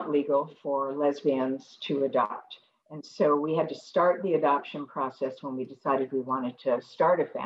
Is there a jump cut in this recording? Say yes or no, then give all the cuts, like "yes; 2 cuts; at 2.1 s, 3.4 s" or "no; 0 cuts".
no; 0 cuts